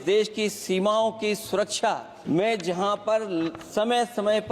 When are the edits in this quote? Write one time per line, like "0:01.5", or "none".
0:02.1